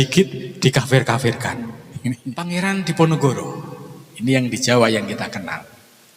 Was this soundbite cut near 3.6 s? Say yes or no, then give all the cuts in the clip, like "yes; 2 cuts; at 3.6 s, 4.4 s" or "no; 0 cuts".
no; 1 cut; at 2.3 s